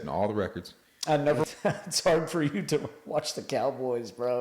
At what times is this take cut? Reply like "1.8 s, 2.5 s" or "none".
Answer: 1.4 s